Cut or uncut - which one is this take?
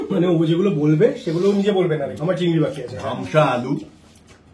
uncut